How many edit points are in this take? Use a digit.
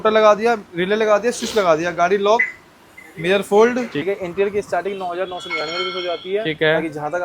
1